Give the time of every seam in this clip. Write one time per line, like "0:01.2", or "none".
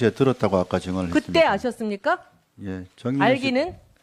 none